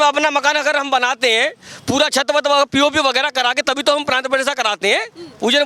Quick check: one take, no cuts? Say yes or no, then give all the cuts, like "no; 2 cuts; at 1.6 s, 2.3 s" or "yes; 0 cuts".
yes; 0 cuts